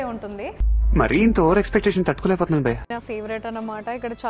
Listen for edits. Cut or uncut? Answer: cut